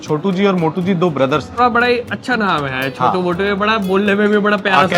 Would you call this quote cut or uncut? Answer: cut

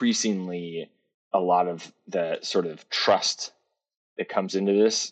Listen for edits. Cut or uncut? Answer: uncut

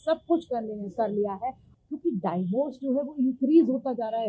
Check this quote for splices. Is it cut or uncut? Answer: cut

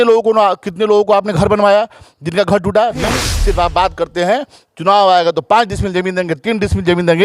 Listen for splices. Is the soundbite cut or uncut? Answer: cut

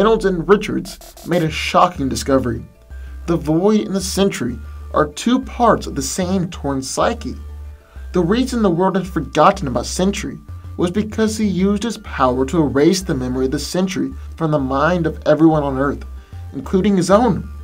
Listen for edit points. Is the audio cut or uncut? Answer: uncut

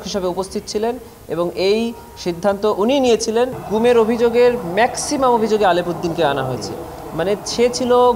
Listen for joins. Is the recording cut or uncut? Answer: cut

